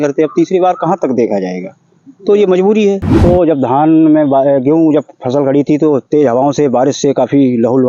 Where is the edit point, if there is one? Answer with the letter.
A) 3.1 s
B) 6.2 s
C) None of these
A